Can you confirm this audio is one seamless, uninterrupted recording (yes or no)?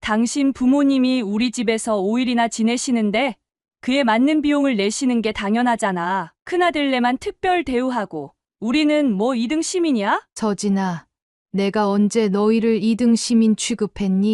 no